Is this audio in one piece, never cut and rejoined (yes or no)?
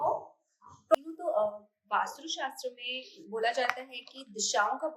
no